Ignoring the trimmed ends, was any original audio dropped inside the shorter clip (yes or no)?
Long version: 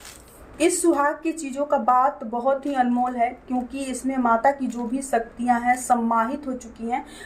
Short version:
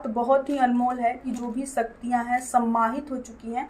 yes